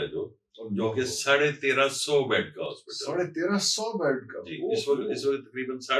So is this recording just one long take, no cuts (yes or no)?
yes